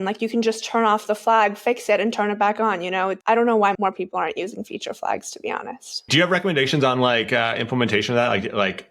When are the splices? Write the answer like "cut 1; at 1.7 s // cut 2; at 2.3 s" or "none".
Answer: cut 1; at 3.2 s // cut 2; at 3.8 s // cut 3; at 6.1 s